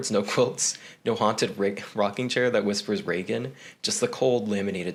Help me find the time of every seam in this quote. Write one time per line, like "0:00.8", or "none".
none